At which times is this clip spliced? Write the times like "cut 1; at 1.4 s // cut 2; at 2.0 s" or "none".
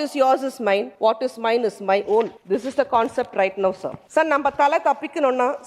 cut 1; at 0.9 s // cut 2; at 2.4 s // cut 3; at 3.9 s